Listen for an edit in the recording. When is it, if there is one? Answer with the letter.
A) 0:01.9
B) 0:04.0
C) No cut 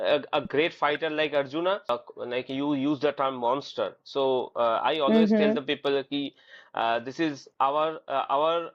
A